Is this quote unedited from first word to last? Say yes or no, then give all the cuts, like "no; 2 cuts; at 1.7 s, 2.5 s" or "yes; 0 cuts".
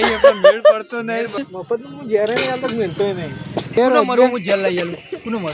no; 2 cuts; at 1.5 s, 3.7 s